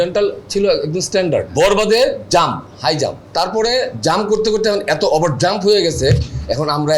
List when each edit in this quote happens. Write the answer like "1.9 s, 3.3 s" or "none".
1.5 s, 3.2 s